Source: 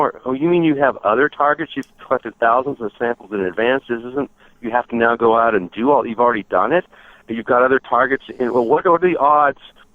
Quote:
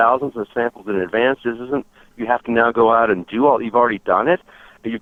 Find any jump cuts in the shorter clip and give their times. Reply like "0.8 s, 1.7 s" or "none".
none